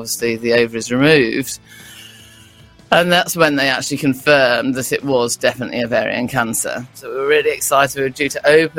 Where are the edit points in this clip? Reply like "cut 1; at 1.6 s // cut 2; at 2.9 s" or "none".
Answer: cut 1; at 7.0 s